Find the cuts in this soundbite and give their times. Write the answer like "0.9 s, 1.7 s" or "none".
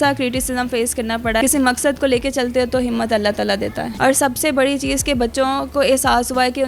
1.4 s, 3.9 s